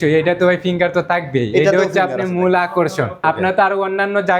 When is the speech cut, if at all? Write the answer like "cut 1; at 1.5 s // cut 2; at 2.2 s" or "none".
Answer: cut 1; at 3.1 s